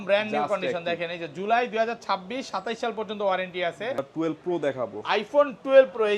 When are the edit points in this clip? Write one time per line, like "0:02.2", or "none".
0:04.1